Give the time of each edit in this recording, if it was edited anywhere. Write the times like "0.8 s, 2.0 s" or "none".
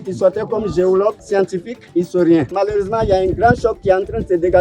1.4 s, 2.5 s